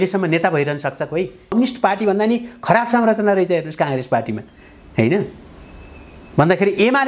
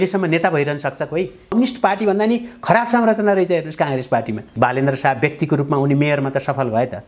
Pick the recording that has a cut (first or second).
second